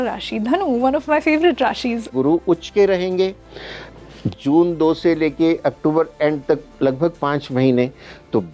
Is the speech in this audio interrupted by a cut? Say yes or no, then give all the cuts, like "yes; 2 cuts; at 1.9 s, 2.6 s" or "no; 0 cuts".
yes; 1 cut; at 2.1 s